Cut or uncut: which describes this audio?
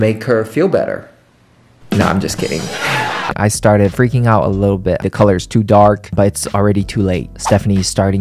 cut